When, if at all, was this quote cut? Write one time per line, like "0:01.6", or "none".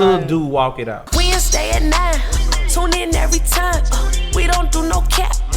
0:01.0